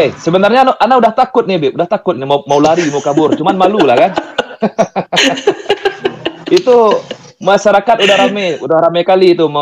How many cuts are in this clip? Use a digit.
0